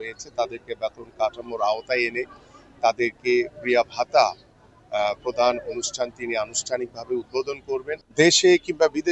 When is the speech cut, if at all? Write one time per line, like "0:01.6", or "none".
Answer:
0:08.0